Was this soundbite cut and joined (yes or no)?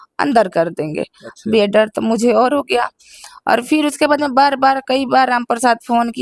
no